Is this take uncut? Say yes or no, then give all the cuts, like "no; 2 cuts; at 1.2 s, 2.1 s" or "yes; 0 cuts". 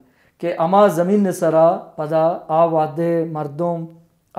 yes; 0 cuts